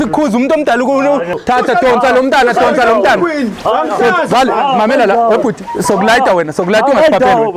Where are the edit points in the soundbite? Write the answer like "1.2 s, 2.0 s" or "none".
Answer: 1.4 s